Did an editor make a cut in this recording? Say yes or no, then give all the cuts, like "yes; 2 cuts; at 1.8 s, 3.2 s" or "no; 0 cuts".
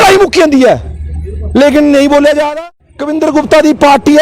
yes; 1 cut; at 2.4 s